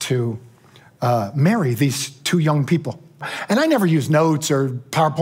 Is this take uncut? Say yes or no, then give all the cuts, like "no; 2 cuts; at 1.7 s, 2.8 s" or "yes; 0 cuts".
no; 1 cut; at 3.3 s